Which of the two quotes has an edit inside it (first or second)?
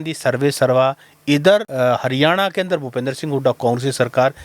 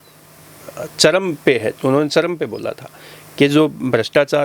first